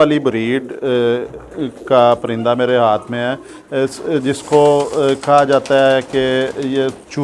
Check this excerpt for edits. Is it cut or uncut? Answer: uncut